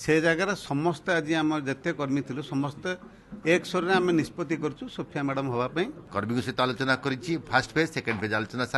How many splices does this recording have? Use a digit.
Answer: 1